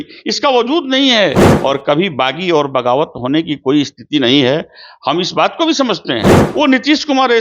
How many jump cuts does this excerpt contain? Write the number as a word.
two